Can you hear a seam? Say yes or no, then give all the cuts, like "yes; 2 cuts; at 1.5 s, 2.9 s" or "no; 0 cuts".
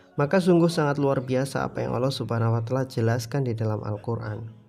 no; 0 cuts